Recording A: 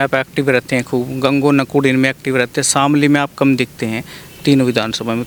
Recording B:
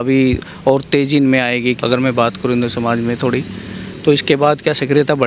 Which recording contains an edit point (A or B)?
B